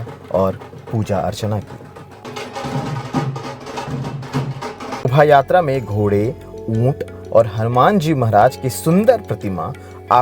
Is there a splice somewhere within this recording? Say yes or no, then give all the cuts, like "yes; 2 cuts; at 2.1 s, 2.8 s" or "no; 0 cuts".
yes; 1 cut; at 5.1 s